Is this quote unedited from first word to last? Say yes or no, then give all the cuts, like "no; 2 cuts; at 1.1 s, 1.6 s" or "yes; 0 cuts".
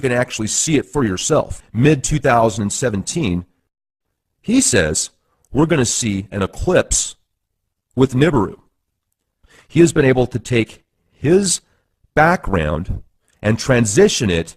no; 1 cut; at 13.1 s